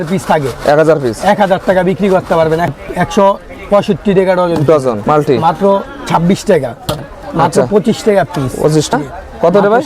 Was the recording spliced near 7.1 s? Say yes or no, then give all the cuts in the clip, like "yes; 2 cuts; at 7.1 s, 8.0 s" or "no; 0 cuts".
yes; 4 cuts; at 2.7 s, 5.0 s, 7.1 s, 8.9 s